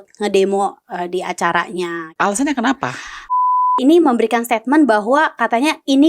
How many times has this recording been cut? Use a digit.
2